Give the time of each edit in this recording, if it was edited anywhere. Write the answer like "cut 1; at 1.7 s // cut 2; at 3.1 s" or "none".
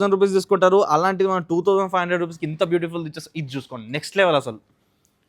none